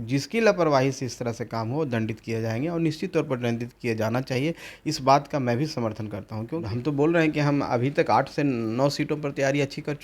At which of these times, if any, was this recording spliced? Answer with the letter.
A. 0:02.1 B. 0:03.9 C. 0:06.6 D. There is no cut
C